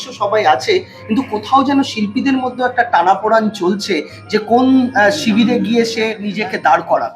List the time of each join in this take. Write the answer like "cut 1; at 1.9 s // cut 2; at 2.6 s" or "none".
cut 1; at 6.2 s